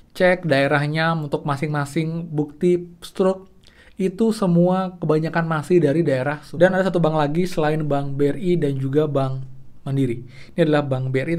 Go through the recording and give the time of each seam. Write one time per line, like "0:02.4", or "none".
0:06.4